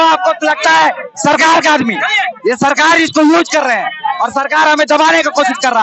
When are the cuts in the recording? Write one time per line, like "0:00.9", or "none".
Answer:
none